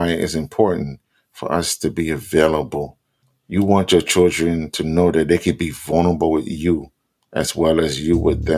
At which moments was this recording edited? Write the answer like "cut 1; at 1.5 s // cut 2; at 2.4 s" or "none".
none